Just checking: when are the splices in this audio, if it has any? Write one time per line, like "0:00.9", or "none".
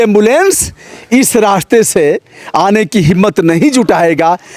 none